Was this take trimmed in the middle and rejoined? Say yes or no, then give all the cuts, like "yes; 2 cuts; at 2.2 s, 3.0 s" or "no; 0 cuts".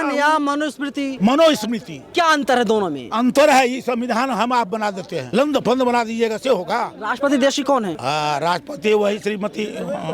yes; 5 cuts; at 1.1 s, 1.9 s, 5.1 s, 7.0 s, 8.0 s